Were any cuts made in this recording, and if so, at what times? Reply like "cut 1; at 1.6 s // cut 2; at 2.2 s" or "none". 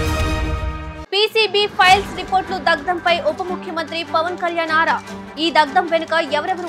cut 1; at 0.9 s